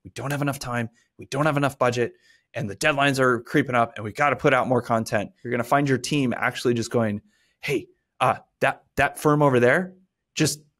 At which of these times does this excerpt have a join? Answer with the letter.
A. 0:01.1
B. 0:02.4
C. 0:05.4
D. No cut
C